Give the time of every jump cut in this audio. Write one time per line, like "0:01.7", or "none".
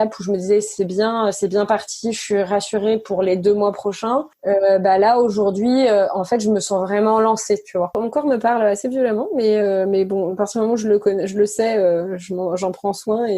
0:04.3
0:07.9